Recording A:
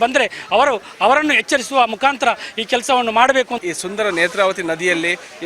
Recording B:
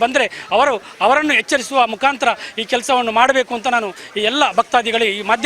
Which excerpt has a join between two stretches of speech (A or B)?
A